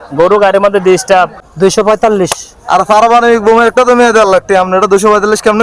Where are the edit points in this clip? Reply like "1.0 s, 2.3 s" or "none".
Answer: 1.4 s

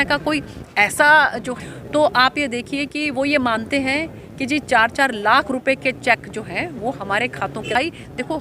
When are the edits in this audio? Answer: 1.5 s, 7.8 s

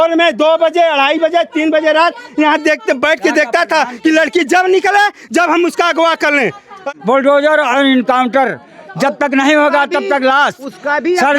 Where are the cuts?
6.8 s

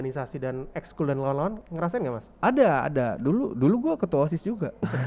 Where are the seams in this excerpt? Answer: 1.6 s

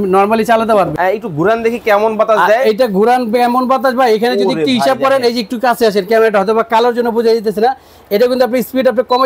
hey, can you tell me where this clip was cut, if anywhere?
0.9 s

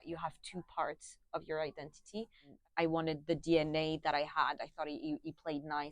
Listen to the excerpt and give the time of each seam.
2.5 s

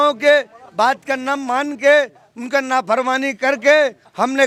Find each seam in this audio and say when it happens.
none

